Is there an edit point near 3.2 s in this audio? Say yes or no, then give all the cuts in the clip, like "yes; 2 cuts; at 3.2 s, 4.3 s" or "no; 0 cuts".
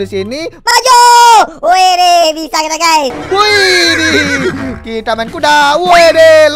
yes; 1 cut; at 3.2 s